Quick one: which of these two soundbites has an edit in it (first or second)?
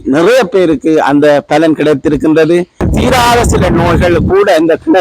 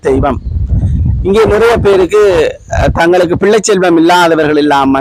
first